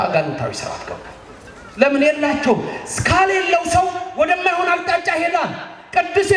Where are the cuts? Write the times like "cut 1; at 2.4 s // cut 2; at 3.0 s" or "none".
none

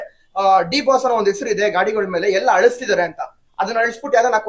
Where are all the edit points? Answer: none

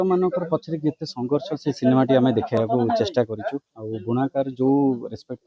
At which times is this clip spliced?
none

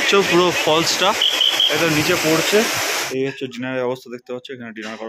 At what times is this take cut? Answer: cut 1; at 3.0 s

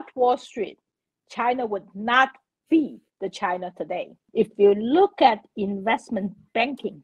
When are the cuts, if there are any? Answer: cut 1; at 4.2 s

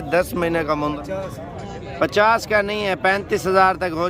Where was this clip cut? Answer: cut 1; at 1.0 s

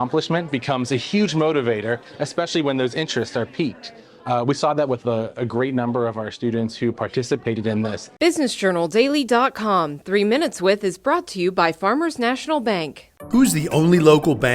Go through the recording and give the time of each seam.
cut 1; at 8.0 s

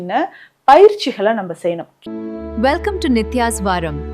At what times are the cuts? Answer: cut 1; at 1.9 s

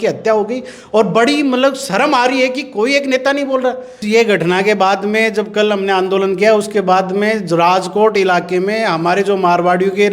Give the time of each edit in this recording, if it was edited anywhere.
cut 1; at 4.0 s

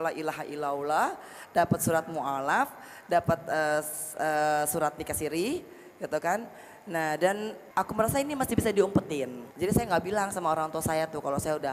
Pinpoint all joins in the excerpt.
cut 1; at 7.6 s // cut 2; at 9.4 s

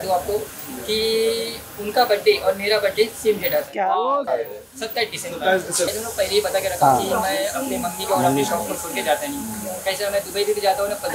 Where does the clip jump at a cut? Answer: cut 1; at 4.3 s // cut 2; at 5.9 s

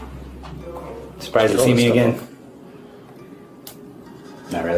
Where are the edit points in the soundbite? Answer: none

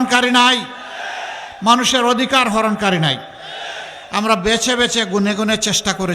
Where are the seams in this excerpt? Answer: none

